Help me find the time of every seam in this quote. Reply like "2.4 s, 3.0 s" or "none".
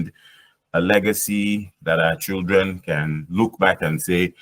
none